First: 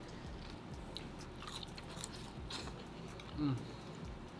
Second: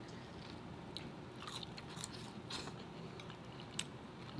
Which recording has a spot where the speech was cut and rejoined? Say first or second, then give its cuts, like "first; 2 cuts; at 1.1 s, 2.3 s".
first; 1 cut; at 3.3 s